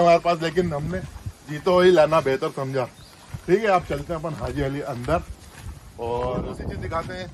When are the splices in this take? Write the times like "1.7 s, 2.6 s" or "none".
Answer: 6.4 s